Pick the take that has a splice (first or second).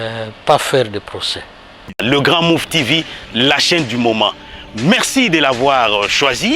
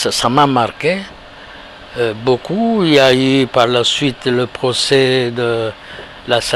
first